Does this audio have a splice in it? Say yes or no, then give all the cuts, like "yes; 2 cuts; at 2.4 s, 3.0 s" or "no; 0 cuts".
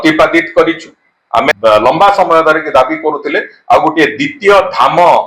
yes; 1 cut; at 1.5 s